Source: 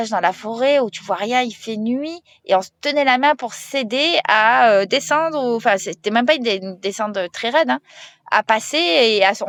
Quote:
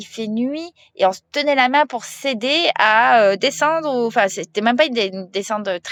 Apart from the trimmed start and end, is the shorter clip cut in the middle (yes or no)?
no